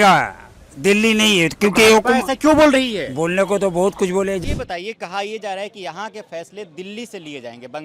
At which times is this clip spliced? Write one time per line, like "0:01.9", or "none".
0:04.4